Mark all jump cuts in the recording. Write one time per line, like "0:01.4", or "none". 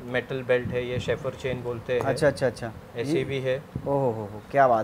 none